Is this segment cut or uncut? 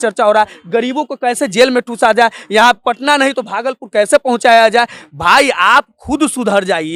uncut